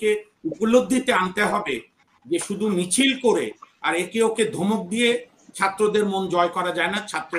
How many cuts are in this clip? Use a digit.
0